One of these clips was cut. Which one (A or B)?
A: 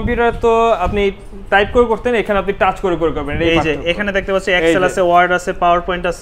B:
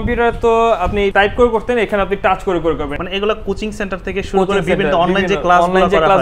B